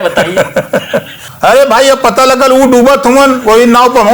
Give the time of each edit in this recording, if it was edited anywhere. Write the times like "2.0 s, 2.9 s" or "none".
1.2 s